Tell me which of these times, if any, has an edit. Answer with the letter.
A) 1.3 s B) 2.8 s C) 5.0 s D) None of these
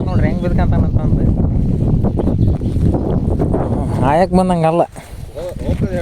D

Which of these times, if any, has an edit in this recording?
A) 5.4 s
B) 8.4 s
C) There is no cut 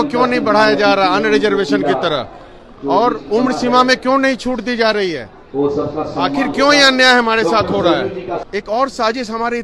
B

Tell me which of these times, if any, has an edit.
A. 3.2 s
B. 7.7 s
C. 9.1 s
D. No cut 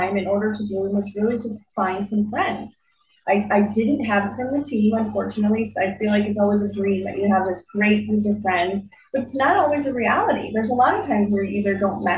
D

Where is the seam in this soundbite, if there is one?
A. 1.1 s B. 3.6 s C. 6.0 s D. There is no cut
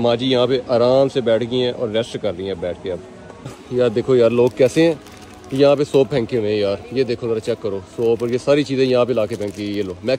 B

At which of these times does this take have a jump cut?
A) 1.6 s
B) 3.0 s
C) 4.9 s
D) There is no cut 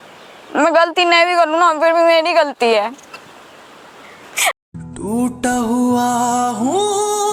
D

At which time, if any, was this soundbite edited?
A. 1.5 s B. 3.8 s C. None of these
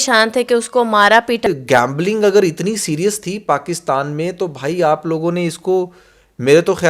A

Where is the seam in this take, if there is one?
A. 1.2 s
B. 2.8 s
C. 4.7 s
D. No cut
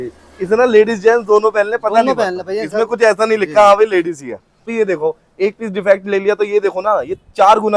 C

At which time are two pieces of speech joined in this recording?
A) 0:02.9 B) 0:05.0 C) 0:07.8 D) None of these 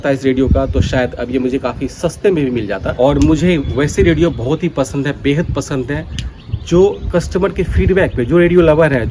A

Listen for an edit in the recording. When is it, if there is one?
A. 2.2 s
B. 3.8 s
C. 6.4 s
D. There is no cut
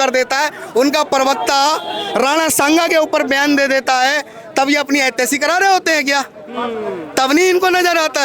D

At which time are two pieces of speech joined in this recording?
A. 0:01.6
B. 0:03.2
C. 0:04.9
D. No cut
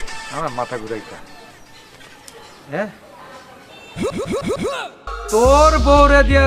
C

